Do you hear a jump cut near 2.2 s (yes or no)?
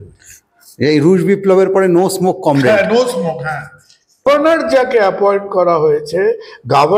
no